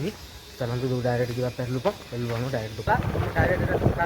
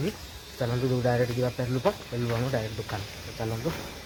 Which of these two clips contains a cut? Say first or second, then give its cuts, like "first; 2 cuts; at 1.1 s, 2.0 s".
first; 1 cut; at 2.9 s